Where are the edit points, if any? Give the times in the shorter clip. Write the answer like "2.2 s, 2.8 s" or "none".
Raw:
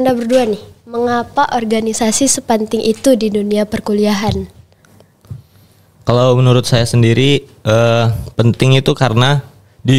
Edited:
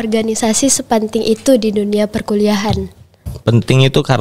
3.3 s